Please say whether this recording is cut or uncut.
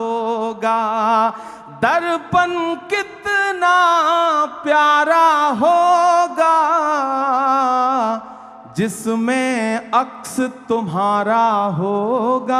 uncut